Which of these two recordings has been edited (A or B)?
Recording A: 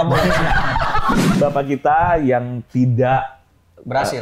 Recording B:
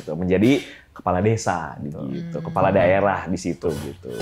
A